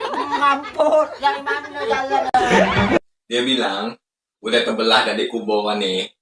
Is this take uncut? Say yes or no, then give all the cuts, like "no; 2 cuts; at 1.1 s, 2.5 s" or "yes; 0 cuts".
yes; 0 cuts